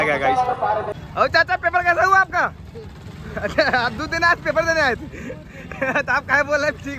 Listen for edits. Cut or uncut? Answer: cut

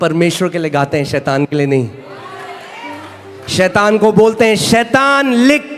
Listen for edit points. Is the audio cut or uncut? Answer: uncut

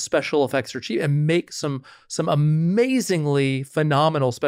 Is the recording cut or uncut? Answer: uncut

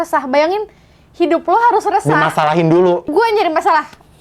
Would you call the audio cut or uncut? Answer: cut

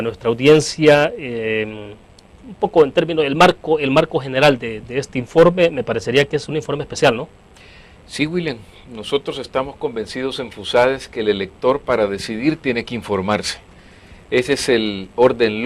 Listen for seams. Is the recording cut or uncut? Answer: cut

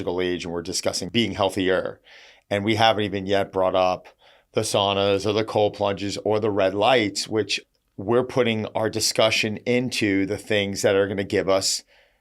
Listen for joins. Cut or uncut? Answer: cut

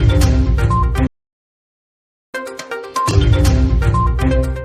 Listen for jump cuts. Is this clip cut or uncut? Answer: uncut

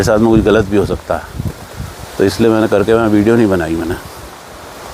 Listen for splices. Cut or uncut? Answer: uncut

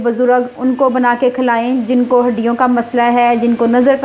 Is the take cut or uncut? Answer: uncut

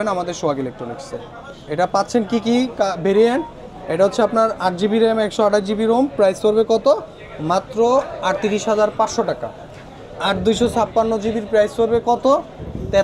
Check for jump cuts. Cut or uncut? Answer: uncut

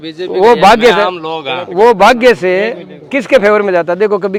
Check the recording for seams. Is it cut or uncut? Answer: uncut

